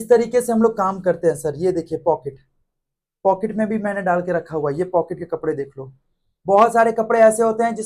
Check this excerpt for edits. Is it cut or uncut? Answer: uncut